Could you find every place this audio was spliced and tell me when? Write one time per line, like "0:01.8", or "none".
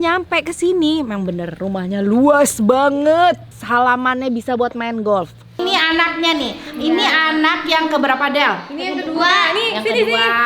0:03.5
0:05.6